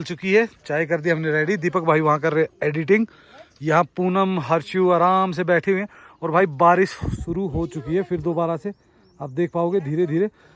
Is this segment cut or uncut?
uncut